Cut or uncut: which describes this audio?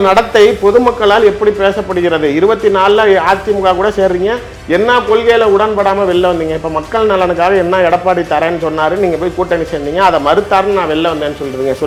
uncut